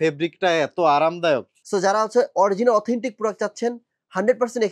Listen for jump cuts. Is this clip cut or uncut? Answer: cut